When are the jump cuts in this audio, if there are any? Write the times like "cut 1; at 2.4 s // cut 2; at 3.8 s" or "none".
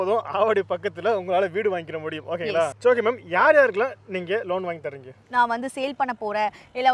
cut 1; at 5.2 s